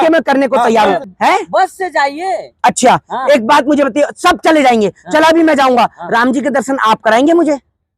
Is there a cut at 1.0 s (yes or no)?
yes